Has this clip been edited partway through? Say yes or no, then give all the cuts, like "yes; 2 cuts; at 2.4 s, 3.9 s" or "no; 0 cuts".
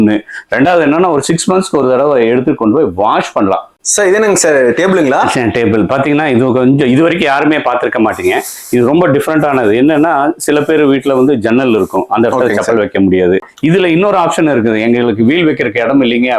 yes; 2 cuts; at 3.9 s, 13.5 s